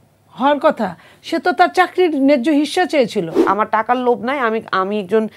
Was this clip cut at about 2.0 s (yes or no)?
no